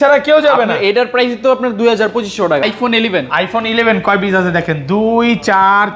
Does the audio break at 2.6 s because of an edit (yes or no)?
yes